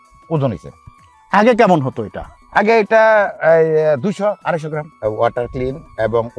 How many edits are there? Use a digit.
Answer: 1